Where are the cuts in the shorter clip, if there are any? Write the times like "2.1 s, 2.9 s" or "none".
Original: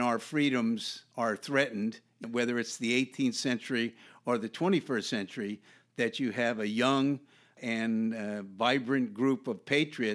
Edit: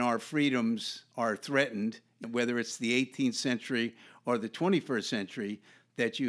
none